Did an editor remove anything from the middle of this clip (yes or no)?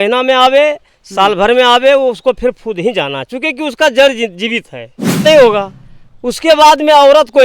yes